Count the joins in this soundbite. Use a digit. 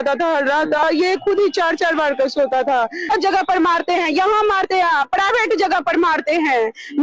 2